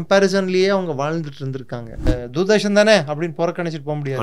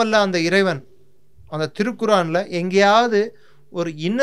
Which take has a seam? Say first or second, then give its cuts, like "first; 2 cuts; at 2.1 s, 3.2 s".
first; 1 cut; at 2.1 s